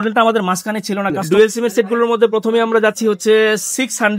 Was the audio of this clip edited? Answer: yes; 1 cut; at 1.2 s

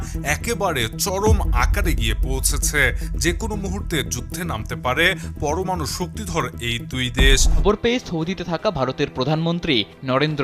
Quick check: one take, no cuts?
no; 1 cut; at 7.6 s

